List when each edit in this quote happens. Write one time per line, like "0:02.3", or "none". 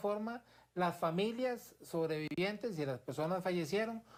none